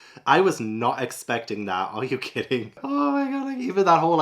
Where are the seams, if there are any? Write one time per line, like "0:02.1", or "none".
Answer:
none